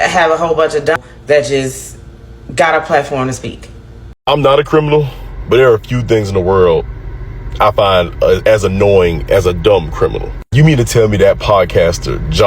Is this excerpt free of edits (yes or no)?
no